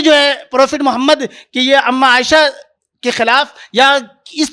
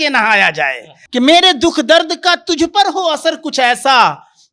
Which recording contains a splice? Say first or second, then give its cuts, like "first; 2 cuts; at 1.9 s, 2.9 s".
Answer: second; 1 cut; at 1.0 s